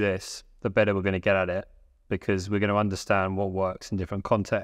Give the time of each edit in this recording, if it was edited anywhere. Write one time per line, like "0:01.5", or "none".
none